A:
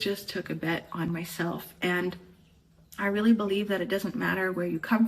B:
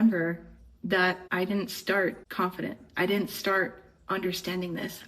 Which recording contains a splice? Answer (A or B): B